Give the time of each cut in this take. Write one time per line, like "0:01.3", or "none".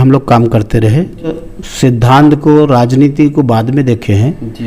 0:01.4